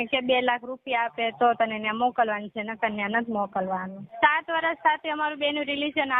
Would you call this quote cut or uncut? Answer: cut